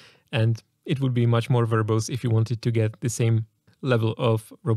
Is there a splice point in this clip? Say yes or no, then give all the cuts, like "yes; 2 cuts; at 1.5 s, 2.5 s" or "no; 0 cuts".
no; 0 cuts